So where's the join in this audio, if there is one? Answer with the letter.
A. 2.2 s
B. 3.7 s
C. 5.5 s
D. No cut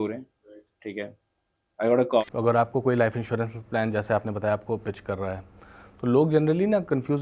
A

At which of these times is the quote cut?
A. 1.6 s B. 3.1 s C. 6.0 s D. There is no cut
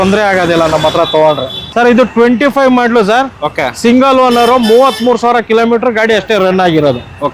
A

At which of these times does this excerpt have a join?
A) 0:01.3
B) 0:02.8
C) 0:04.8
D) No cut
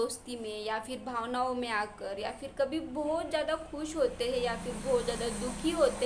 D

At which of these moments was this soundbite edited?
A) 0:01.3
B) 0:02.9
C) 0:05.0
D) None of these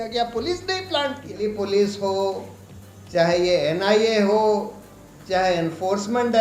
A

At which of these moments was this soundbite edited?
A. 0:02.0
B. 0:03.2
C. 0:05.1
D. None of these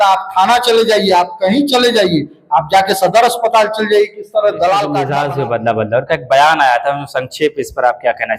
C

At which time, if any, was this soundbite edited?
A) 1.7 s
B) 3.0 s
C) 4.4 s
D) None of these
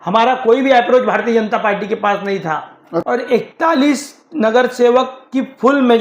B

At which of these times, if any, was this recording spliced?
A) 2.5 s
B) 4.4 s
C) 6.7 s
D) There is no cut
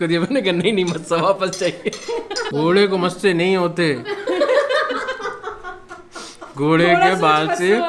A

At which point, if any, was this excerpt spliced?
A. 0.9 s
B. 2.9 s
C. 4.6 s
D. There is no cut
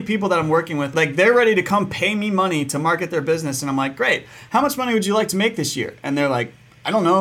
A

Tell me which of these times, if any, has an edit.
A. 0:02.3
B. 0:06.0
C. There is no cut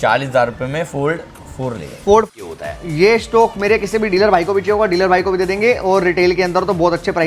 A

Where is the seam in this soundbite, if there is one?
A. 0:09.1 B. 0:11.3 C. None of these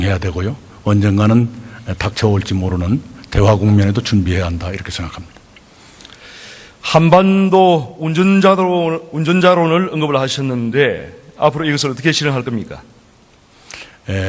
C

